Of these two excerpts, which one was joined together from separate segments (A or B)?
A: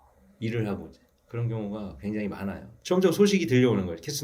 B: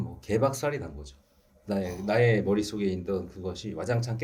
A